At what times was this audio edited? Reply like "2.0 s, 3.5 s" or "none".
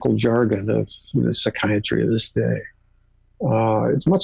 none